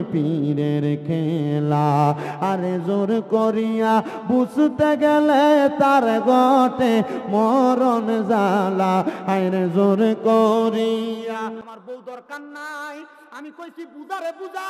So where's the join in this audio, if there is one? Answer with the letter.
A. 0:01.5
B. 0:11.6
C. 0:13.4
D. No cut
B